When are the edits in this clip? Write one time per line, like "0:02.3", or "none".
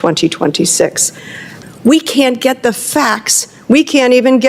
0:01.5